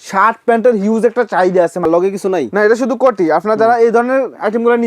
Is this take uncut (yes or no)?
no